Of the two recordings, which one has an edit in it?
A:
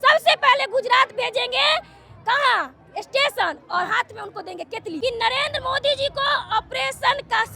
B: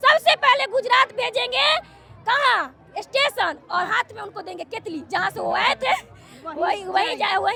A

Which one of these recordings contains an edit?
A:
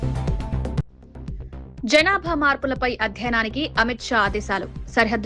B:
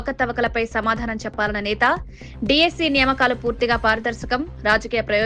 A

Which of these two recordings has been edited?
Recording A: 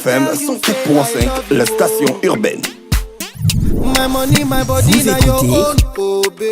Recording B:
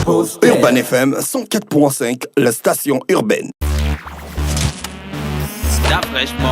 B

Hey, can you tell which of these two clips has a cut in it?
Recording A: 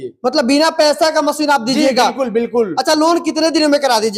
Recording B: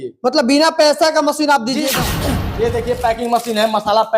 B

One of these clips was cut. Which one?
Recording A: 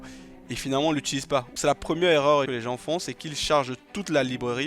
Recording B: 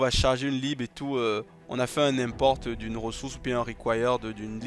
A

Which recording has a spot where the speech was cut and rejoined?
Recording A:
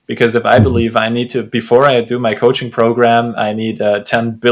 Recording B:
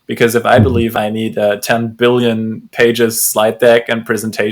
B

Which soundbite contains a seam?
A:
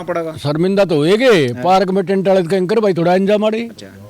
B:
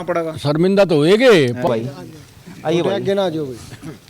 B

